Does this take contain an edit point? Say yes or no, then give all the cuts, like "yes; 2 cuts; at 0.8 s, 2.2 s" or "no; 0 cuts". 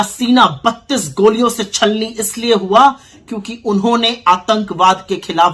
no; 0 cuts